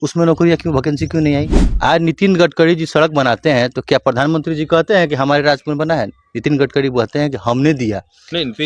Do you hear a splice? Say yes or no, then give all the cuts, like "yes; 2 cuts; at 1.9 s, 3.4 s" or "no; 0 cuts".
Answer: yes; 1 cut; at 1.6 s